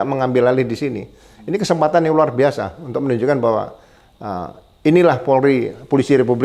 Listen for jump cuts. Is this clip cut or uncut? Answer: uncut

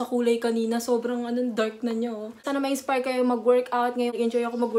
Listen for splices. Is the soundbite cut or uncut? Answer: cut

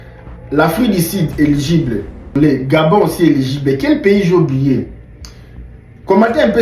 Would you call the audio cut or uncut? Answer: cut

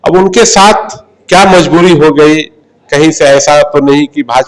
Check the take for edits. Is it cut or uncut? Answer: uncut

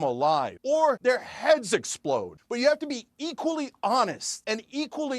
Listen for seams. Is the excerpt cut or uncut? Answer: cut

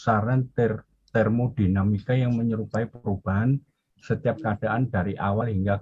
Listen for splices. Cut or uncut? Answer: uncut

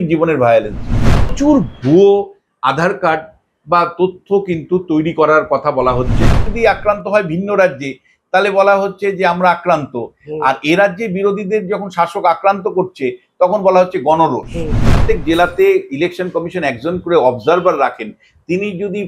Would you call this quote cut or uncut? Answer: cut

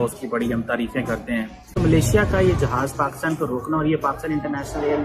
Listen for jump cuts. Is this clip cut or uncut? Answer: uncut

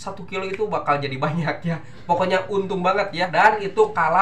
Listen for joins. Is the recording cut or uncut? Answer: cut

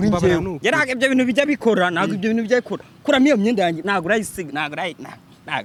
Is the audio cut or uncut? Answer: uncut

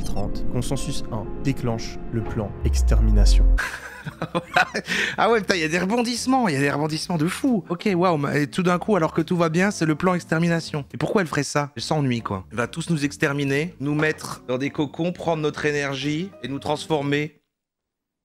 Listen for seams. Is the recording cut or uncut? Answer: uncut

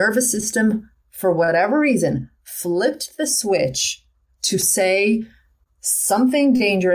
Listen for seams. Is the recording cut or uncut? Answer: uncut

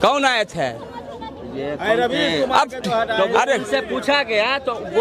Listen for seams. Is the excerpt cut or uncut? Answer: uncut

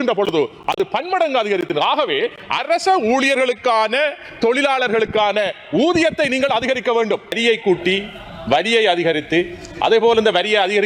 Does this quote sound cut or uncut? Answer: cut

